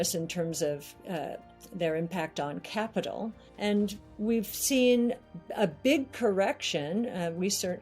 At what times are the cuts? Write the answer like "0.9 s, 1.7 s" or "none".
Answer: 3.4 s

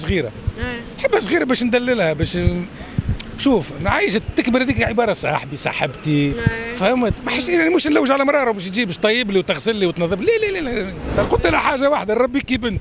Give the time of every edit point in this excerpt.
11.2 s

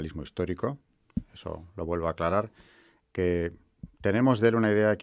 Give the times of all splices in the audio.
3.1 s

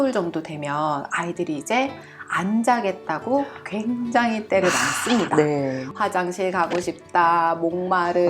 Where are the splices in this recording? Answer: 5.9 s

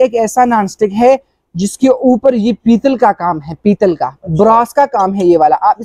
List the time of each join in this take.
none

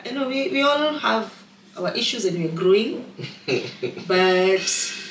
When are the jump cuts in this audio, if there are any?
none

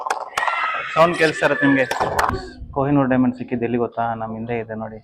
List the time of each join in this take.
2.3 s

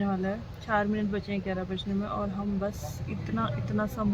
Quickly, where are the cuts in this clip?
none

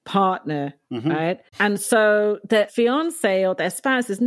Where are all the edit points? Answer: 1.5 s, 2.7 s

